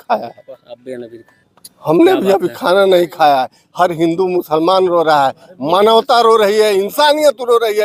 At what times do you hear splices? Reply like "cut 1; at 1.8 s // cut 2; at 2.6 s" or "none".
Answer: none